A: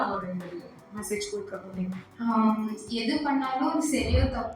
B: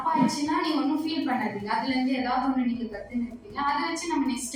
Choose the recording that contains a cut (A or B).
A